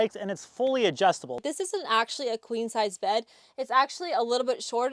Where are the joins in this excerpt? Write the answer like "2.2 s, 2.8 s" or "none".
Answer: 1.4 s